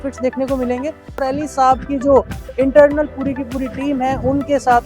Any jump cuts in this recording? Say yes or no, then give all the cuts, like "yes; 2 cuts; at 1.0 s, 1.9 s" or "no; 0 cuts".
yes; 1 cut; at 1.3 s